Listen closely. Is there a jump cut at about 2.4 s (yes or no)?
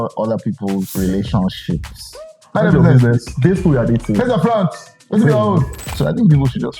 yes